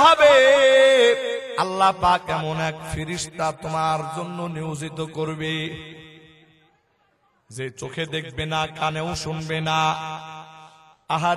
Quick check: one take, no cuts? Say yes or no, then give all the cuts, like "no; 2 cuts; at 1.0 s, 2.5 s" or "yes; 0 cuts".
no; 1 cut; at 1.5 s